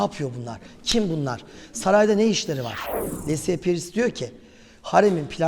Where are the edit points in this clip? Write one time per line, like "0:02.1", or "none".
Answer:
0:02.8